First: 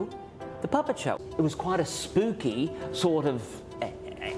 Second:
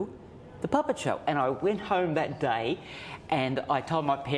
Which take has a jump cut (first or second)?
first